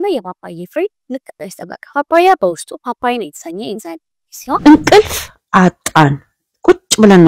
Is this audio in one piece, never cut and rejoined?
no; 1 cut; at 4.6 s

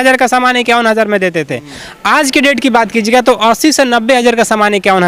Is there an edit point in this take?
no; 0 cuts

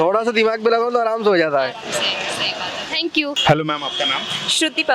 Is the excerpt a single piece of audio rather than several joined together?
yes; 0 cuts

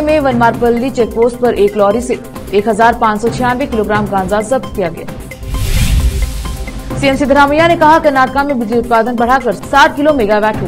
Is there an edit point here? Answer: no; 0 cuts

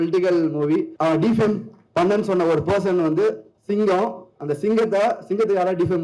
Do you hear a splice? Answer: yes; 1 cut; at 0.9 s

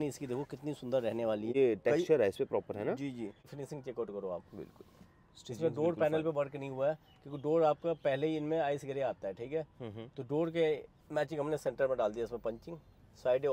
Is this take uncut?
no; 2 cuts; at 1.5 s, 3.5 s

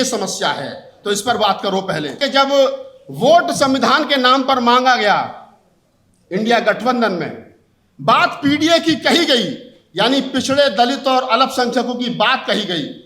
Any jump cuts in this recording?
yes; 1 cut; at 2.2 s

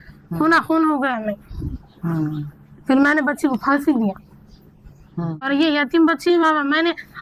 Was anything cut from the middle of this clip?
yes; 1 cut; at 5.5 s

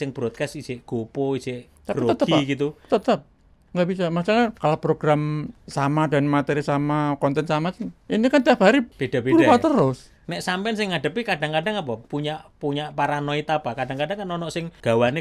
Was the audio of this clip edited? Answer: no; 0 cuts

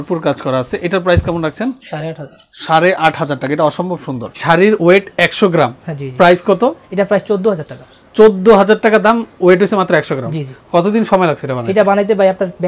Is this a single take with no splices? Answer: no; 1 cut; at 4.4 s

